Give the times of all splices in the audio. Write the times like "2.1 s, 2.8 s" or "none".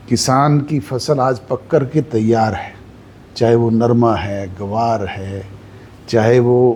none